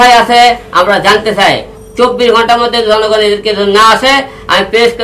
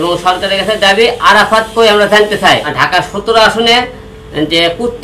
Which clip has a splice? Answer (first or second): second